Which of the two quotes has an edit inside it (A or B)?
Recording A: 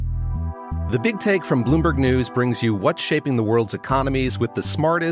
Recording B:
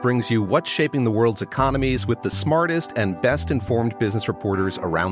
A